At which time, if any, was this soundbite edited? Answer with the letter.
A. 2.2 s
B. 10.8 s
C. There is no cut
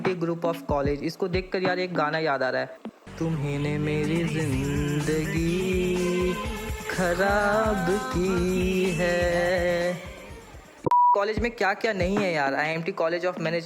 B